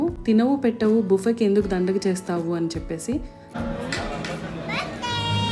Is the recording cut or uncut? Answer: cut